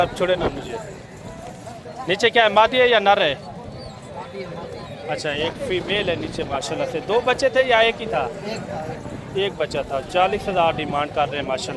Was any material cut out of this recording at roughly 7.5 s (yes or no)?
no